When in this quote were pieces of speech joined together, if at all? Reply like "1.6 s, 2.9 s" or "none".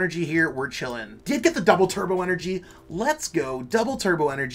1.1 s